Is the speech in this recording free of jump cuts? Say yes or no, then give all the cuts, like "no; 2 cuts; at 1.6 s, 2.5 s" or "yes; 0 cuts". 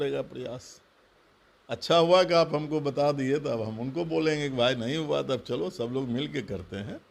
yes; 0 cuts